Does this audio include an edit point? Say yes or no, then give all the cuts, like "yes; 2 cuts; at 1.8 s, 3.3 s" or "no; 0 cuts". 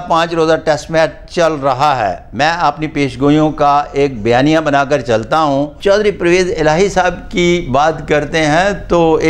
yes; 1 cut; at 5.7 s